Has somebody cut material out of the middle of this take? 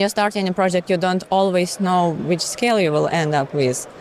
no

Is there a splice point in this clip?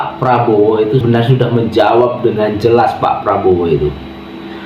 yes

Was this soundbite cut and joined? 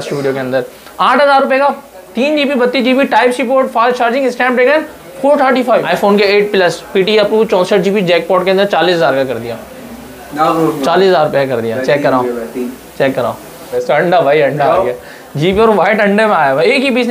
yes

